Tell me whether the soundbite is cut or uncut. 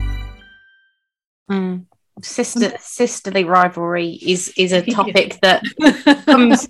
uncut